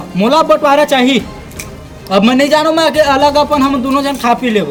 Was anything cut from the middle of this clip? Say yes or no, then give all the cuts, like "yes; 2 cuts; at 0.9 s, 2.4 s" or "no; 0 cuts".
no; 0 cuts